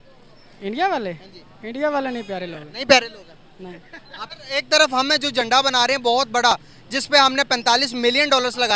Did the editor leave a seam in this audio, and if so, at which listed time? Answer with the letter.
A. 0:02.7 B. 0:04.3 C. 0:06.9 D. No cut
B